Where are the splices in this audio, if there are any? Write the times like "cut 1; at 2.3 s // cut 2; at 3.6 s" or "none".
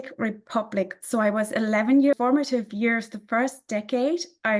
cut 1; at 1.0 s // cut 2; at 2.1 s